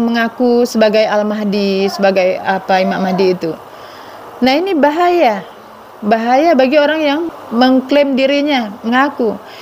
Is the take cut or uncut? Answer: cut